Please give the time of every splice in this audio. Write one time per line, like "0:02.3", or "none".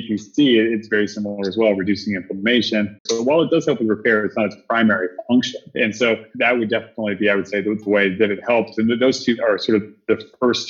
0:03.0